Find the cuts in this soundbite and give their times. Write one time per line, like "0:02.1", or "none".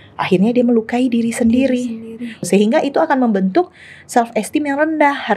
0:02.4